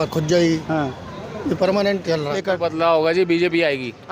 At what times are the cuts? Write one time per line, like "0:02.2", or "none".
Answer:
0:02.4